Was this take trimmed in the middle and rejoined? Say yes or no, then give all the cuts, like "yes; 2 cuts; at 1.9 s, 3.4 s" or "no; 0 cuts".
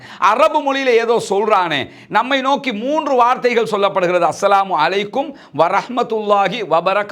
no; 0 cuts